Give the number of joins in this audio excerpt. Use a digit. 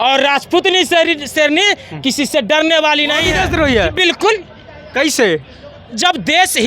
1